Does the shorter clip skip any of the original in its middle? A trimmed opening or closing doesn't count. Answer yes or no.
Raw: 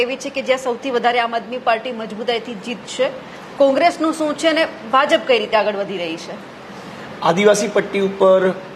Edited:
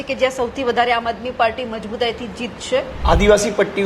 yes